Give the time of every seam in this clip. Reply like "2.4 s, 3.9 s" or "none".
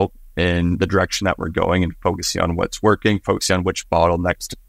none